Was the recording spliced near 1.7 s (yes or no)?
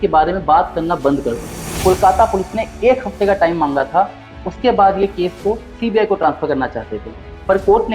yes